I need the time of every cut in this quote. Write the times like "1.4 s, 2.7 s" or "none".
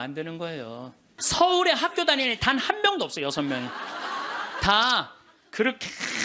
1.1 s